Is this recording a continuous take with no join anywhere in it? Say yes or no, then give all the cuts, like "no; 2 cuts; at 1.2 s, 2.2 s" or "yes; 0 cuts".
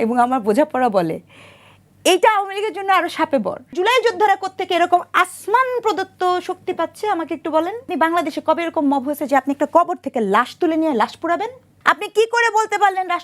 no; 3 cuts; at 3.7 s, 7.9 s, 11.6 s